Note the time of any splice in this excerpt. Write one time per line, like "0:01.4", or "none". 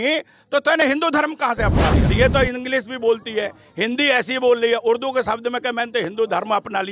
0:02.1